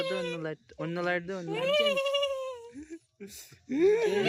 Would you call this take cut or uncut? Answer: uncut